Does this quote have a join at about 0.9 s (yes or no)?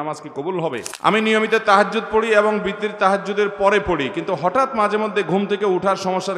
yes